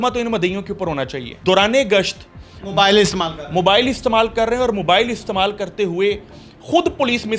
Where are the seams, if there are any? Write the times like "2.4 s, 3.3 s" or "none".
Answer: 1.2 s